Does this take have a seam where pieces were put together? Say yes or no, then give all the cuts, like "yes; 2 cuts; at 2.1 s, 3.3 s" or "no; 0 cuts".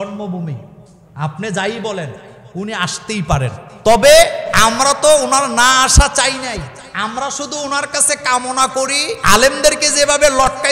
yes; 4 cuts; at 3.6 s, 4.4 s, 6.8 s, 9.1 s